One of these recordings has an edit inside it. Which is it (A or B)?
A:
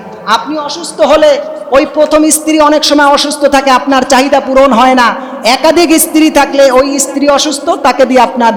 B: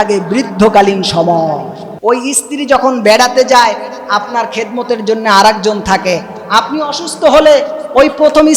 B